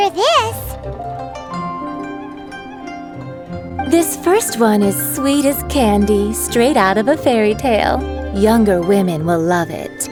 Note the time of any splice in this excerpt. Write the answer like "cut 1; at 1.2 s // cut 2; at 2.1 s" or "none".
none